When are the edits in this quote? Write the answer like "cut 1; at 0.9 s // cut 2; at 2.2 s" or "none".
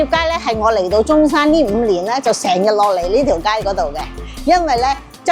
none